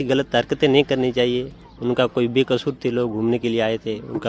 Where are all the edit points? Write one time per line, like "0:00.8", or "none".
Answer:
none